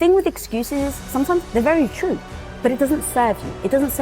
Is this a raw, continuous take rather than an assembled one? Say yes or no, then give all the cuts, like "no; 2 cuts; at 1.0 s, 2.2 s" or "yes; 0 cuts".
no; 1 cut; at 2.5 s